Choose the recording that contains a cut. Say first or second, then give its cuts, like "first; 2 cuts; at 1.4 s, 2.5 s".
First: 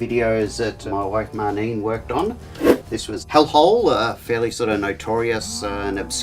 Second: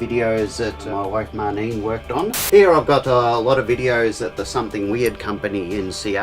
second; 1 cut; at 2.4 s